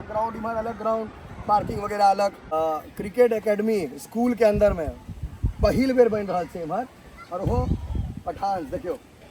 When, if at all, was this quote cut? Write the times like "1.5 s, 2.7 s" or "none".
2.5 s